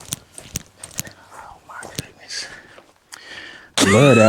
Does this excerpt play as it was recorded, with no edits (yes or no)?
yes